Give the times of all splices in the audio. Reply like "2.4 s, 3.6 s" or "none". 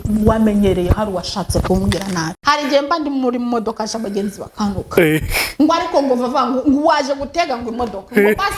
2.3 s